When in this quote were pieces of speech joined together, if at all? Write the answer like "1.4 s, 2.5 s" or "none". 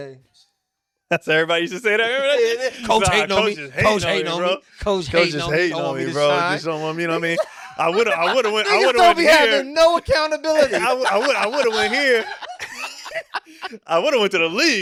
none